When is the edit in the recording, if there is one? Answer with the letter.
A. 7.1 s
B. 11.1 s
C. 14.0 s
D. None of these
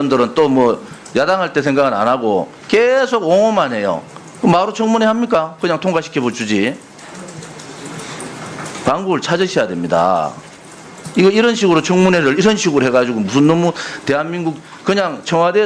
B